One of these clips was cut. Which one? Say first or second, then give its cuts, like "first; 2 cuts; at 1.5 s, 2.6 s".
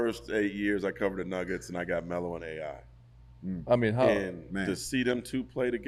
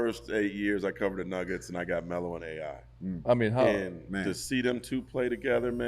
second; 1 cut; at 2.9 s